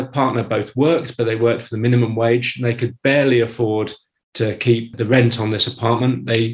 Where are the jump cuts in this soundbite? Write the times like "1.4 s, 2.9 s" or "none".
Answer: 4.9 s